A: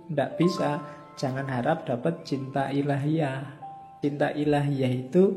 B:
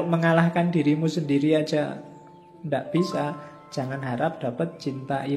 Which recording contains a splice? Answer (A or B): A